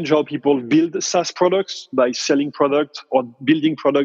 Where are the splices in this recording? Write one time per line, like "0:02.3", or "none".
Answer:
none